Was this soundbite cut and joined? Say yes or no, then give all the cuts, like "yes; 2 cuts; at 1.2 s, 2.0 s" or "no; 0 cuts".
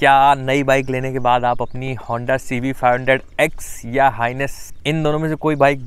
yes; 1 cut; at 4.6 s